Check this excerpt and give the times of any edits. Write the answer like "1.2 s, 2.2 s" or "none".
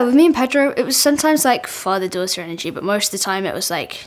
none